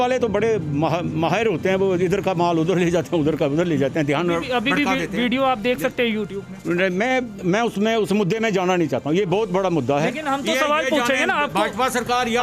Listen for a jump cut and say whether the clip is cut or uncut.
uncut